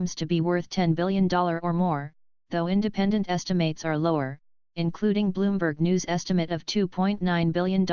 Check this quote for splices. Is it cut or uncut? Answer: uncut